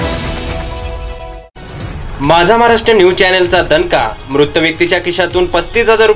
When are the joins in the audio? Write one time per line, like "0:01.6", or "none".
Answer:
0:01.5